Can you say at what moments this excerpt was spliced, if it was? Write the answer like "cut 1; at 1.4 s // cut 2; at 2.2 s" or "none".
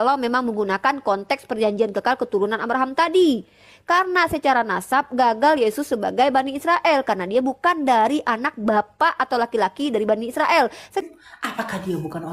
cut 1; at 11.0 s